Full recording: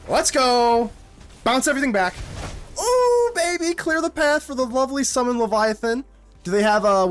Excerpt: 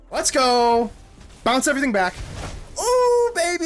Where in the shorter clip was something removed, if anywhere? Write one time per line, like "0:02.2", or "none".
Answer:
none